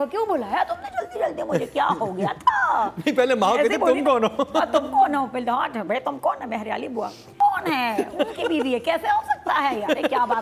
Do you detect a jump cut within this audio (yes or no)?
yes